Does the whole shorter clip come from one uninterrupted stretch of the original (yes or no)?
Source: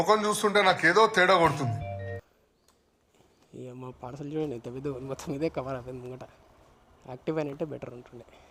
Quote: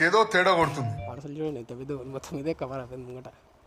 no